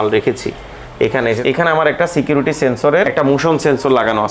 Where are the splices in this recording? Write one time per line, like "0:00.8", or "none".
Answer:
0:01.4
0:03.1